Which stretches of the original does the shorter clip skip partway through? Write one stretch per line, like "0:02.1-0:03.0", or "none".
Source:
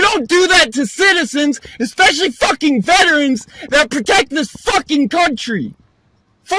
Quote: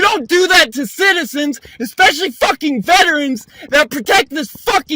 none